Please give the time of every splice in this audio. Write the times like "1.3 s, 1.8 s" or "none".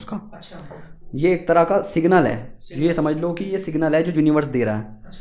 none